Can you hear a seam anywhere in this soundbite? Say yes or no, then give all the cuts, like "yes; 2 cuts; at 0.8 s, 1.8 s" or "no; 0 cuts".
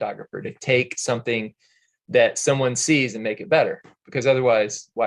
no; 0 cuts